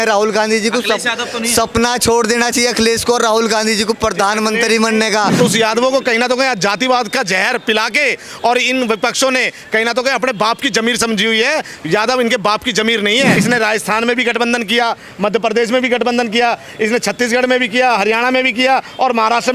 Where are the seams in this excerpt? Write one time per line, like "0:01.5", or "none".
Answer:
0:05.4
0:13.4

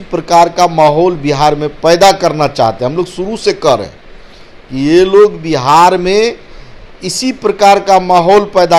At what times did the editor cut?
none

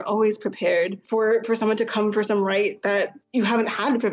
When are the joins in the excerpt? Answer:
0:01.0
0:03.2

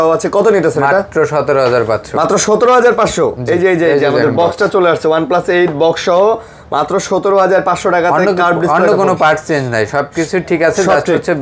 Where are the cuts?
none

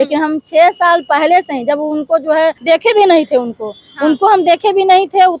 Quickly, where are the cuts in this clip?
0:02.6

